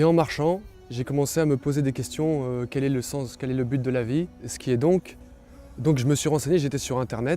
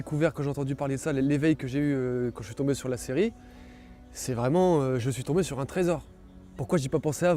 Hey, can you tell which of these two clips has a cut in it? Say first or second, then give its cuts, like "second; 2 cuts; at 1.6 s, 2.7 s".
first; 1 cut; at 4.5 s